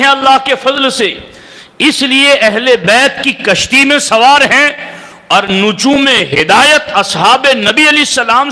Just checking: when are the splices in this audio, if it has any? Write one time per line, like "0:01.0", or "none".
none